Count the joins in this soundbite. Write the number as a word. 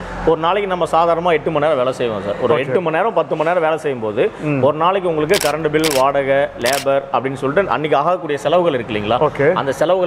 zero